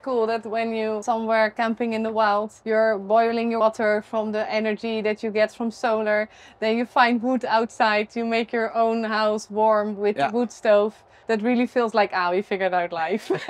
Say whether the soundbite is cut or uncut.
cut